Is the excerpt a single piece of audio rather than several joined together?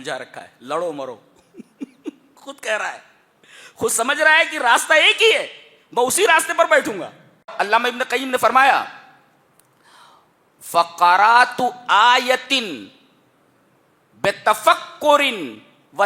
no; 1 cut; at 7.5 s

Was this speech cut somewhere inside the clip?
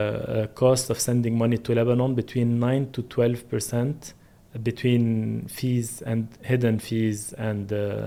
no; 0 cuts

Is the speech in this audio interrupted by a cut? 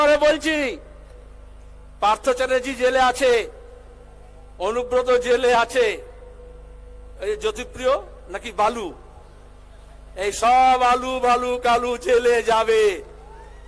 no; 0 cuts

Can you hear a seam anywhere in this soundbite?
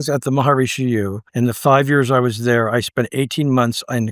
yes; 1 cut; at 1.2 s

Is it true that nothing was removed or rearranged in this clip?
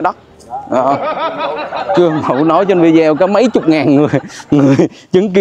yes; 0 cuts

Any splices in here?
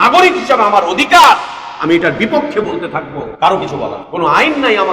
yes; 2 cuts; at 3.2 s, 4.0 s

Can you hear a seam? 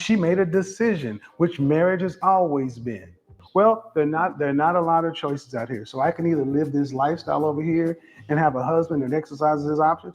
yes; 1 cut; at 3.4 s

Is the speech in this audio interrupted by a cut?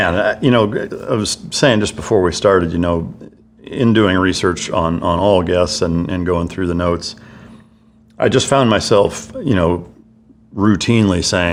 no; 0 cuts

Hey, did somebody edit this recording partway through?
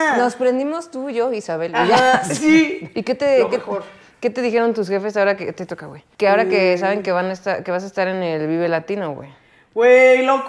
yes; 1 cut; at 2.9 s

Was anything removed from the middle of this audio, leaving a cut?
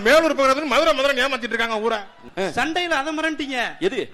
yes; 1 cut; at 2.2 s

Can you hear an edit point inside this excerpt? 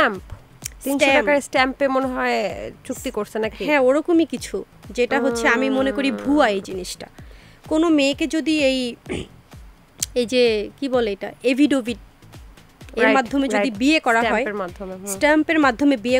no; 0 cuts

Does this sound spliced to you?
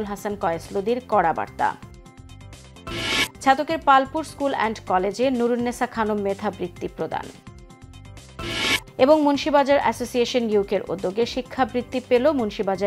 no; 0 cuts

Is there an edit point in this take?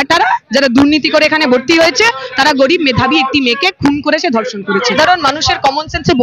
yes; 1 cut; at 5.0 s

